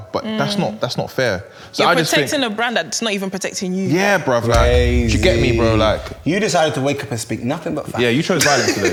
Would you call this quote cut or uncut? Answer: uncut